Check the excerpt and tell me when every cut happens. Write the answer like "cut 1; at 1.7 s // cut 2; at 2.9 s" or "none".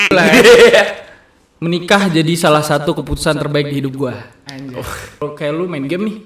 cut 1; at 5.3 s